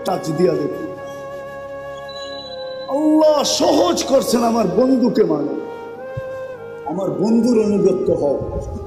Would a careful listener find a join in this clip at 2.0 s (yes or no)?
no